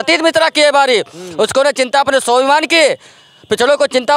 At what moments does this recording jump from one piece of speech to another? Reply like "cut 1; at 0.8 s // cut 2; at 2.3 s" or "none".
none